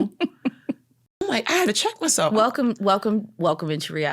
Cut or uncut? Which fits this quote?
cut